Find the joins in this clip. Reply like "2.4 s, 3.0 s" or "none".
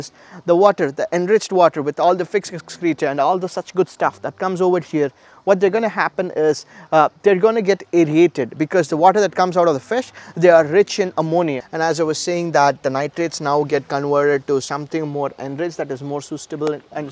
11.6 s